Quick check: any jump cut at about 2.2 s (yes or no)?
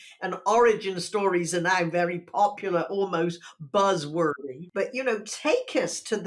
no